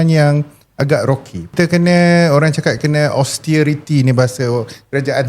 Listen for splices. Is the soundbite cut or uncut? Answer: cut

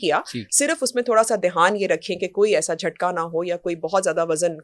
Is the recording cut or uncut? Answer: uncut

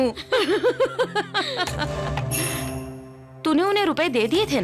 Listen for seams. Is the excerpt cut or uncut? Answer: uncut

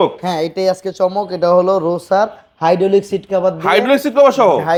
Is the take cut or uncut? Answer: uncut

